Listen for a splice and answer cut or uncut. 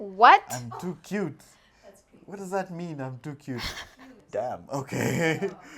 cut